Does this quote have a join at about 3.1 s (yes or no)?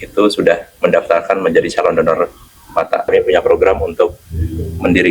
yes